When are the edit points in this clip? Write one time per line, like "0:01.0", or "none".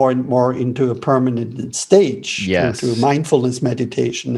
none